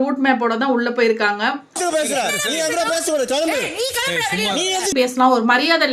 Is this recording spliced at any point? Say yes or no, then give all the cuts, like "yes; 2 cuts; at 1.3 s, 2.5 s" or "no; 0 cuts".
yes; 2 cuts; at 1.7 s, 4.9 s